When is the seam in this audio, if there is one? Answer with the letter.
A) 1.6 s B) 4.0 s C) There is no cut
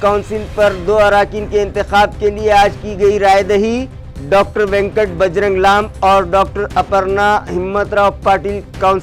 C